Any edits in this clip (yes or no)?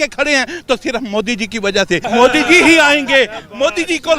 yes